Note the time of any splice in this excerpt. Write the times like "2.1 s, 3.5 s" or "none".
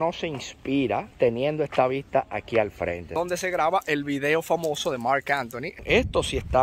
1.1 s, 3.2 s, 5.8 s